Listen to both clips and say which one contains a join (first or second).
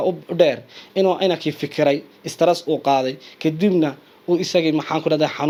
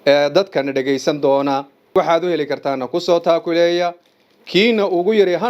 second